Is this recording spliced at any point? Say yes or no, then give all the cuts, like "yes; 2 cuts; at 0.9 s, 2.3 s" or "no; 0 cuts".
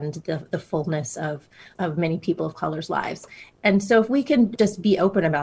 yes; 3 cuts; at 1.6 s, 3.5 s, 4.5 s